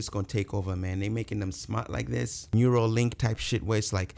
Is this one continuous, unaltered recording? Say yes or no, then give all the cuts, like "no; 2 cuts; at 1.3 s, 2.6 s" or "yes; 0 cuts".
no; 1 cut; at 2.4 s